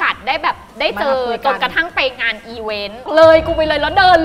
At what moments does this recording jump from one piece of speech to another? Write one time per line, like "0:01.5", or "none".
0:03.0